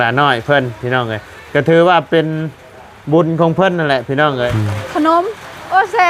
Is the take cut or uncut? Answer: cut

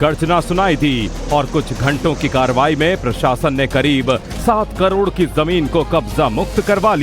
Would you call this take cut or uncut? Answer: uncut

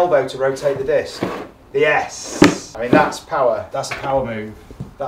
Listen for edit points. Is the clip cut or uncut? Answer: cut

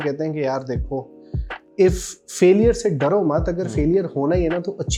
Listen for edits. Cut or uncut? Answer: uncut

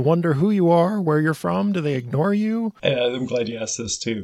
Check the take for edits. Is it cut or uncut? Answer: cut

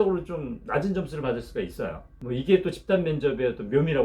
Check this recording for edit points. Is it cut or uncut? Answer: cut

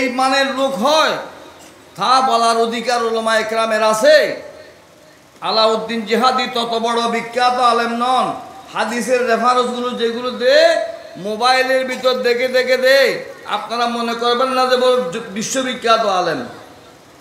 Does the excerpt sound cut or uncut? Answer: uncut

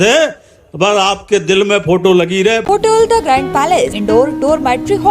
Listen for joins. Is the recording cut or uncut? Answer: cut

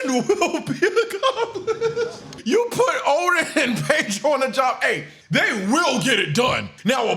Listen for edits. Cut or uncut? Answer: cut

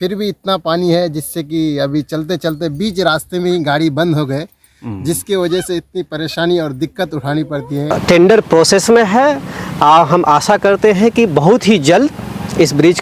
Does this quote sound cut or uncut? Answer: cut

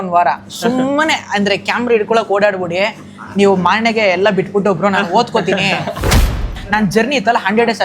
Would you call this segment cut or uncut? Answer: cut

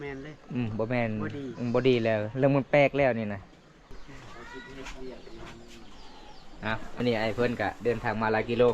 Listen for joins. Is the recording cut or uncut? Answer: cut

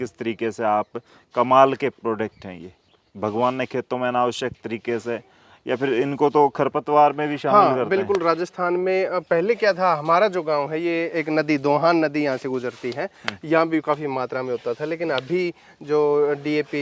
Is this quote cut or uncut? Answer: uncut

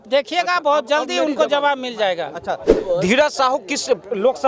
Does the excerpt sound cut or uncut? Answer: cut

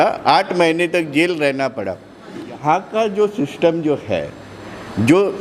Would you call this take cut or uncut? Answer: cut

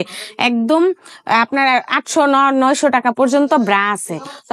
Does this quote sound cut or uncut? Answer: uncut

